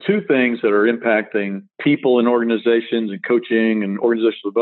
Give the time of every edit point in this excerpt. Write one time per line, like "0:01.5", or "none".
0:01.7